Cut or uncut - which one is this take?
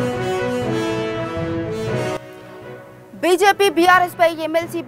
cut